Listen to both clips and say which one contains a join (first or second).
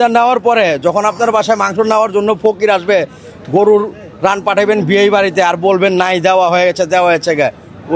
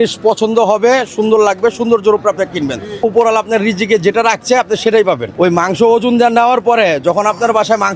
second